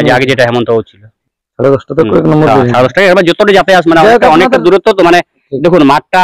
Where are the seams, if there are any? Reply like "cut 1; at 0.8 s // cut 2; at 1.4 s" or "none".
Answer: cut 1; at 1.1 s

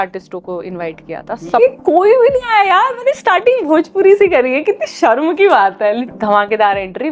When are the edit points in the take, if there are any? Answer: cut 1; at 1.6 s // cut 2; at 6.1 s

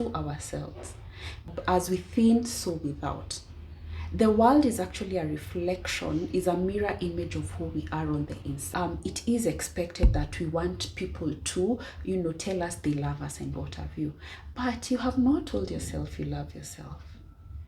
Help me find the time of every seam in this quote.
cut 1; at 1.5 s // cut 2; at 8.6 s

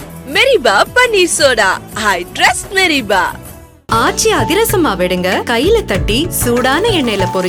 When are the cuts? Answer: none

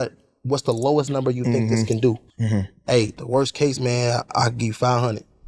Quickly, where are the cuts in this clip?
cut 1; at 2.3 s // cut 2; at 3.2 s

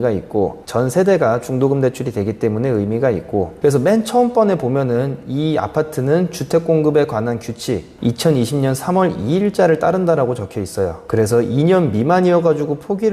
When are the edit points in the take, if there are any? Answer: cut 1; at 3.5 s

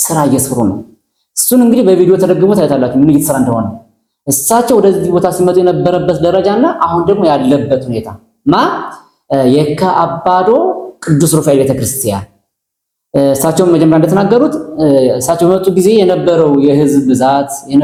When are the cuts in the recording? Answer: none

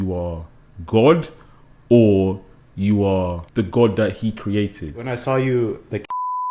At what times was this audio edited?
cut 1; at 3.4 s // cut 2; at 5.0 s

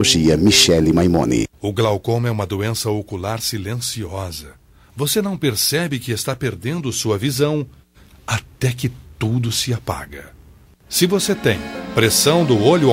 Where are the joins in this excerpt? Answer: cut 1; at 1.6 s

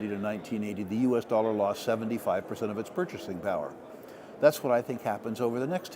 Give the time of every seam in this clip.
none

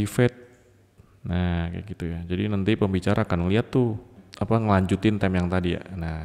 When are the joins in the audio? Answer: cut 1; at 4.2 s

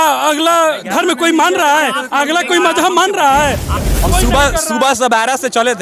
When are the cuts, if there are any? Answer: cut 1; at 3.9 s

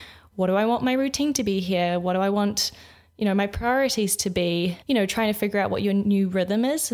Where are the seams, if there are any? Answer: cut 1; at 4.8 s

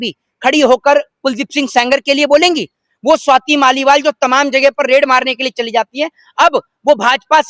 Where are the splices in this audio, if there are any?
none

